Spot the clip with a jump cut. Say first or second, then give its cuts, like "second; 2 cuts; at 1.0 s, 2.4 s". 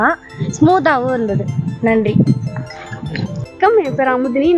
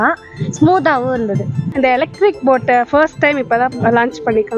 second; 1 cut; at 1.7 s